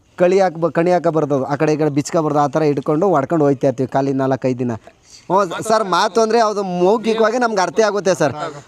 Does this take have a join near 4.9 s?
yes; 1 cut; at 4.9 s

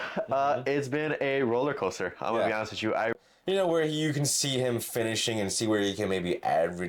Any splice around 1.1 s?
no; 1 cut; at 3.1 s

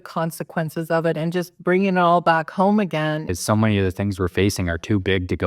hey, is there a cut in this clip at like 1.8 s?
no; 1 cut; at 3.3 s

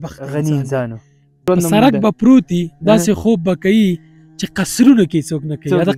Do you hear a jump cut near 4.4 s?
no; 1 cut; at 1.4 s

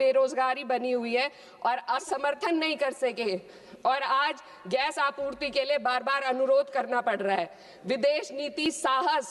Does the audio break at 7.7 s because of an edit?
no; 1 cut; at 2.0 s

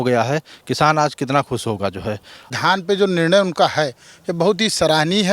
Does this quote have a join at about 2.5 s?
yes; 1 cut; at 2.5 s

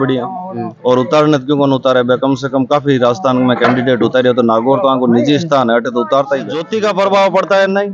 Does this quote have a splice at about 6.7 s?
yes; 1 cut; at 6.7 s

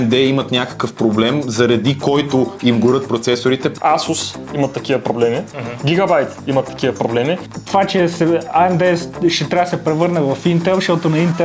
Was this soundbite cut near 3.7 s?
yes; 2 cuts; at 3.7 s, 7.5 s

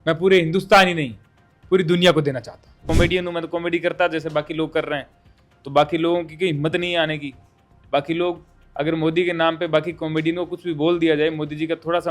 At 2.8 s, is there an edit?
yes; 1 cut; at 2.8 s

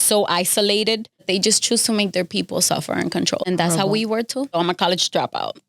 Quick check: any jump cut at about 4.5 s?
yes; 3 cuts; at 1.2 s, 3.5 s, 4.5 s

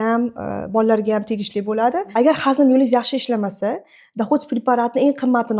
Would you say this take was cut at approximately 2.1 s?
yes; 1 cut; at 2.1 s

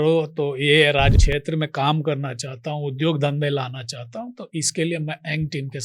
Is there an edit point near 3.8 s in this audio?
no; 1 cut; at 1.2 s

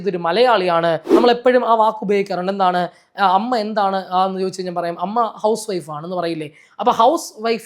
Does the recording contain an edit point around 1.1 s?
yes; 1 cut; at 1.1 s

